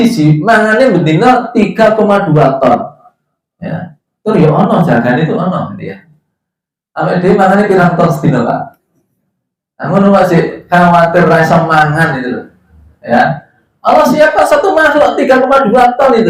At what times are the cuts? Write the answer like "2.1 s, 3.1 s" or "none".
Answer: none